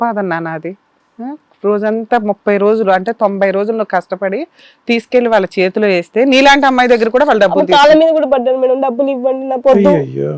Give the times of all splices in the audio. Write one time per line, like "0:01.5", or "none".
none